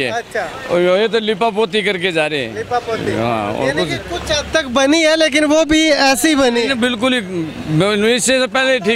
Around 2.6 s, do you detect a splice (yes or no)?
no